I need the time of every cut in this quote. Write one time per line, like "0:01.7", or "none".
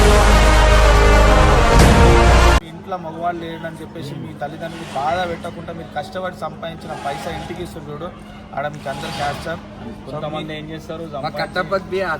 none